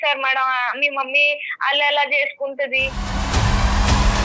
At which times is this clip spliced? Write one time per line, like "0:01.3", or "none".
none

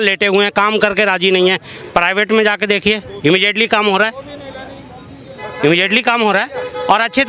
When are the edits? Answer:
none

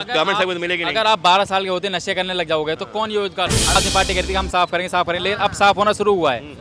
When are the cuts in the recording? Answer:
0:03.8

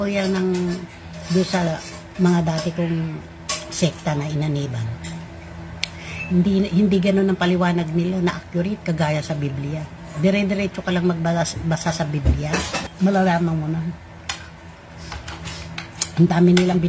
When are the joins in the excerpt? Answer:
0:12.8

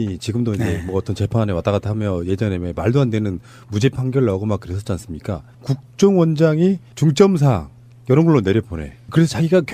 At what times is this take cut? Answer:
0:02.8

